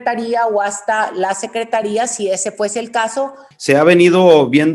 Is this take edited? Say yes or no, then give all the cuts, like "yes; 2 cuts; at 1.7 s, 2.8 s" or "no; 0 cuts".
yes; 1 cut; at 3.5 s